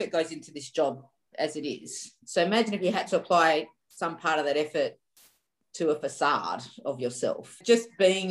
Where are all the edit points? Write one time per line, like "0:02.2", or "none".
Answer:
none